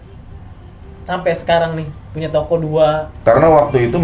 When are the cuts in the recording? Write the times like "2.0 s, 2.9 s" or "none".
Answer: 3.1 s